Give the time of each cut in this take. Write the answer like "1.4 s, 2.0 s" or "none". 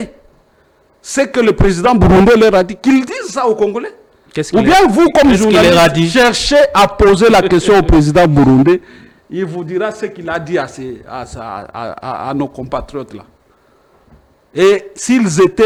none